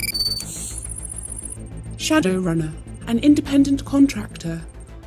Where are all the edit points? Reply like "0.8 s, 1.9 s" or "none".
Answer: 2.0 s